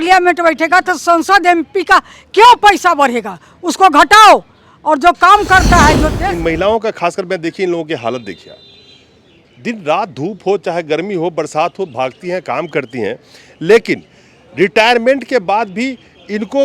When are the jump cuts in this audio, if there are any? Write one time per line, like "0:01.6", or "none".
0:06.1